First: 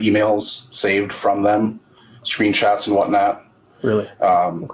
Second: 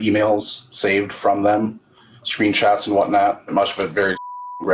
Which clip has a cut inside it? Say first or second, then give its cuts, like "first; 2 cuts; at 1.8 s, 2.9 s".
second; 1 cut; at 3.5 s